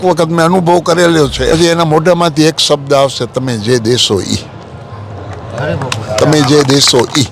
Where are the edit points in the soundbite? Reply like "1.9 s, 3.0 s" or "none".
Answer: 1.5 s